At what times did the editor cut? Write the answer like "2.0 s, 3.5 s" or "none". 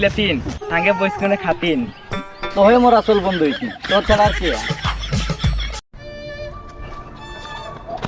6.0 s